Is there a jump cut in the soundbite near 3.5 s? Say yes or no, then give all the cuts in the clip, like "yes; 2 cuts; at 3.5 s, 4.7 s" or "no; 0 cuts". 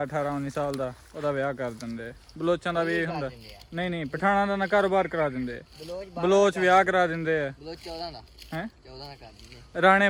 no; 0 cuts